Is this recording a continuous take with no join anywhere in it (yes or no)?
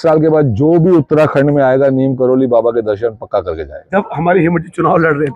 no